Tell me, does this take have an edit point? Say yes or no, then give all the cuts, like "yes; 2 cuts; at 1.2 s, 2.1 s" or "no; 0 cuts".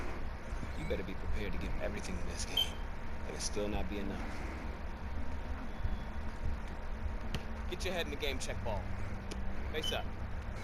no; 0 cuts